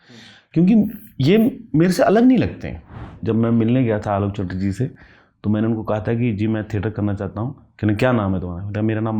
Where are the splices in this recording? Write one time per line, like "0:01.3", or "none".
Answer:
0:03.2

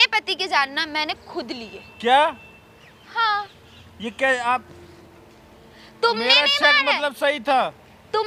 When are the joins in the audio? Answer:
none

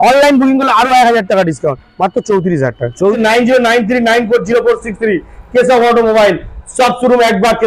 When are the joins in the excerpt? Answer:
0:03.2

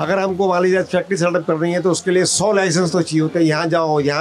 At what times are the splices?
none

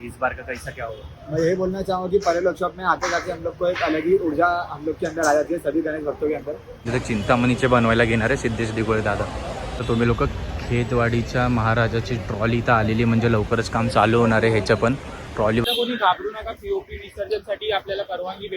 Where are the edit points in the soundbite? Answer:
0:06.9
0:09.7
0:15.6

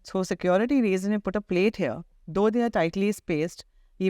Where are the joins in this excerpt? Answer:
none

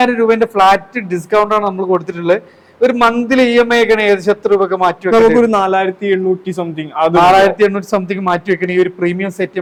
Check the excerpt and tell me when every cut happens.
none

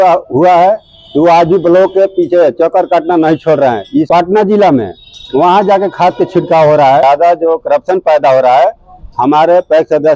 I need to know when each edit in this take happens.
0:04.1
0:07.0

